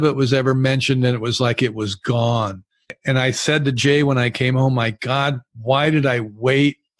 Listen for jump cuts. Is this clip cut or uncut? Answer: cut